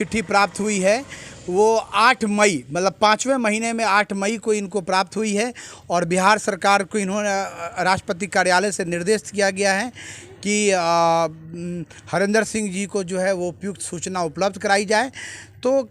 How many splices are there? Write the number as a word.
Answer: zero